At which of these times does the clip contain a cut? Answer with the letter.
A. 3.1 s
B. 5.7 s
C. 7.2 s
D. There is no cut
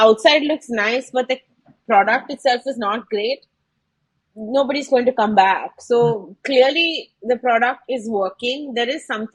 D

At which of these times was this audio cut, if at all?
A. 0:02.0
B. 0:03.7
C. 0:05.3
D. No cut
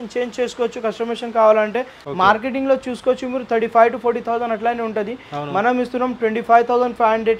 A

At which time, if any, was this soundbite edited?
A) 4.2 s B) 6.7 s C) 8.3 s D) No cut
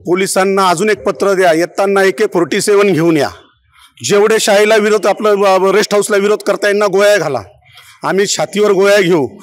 D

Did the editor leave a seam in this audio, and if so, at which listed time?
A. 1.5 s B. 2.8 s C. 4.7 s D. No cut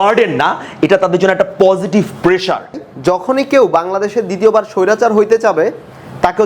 B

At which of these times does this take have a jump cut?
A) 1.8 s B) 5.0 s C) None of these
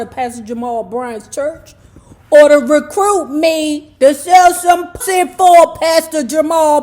B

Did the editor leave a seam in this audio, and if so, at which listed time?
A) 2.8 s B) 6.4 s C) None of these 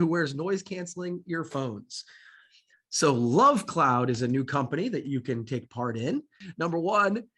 B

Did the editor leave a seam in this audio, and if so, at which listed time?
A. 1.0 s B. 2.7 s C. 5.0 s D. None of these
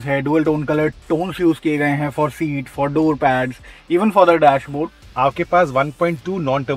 C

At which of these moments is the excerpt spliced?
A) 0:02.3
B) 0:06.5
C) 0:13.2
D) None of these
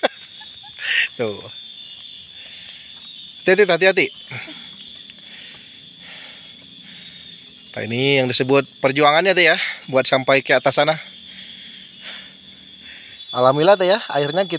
C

